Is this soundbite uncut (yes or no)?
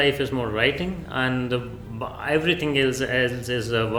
yes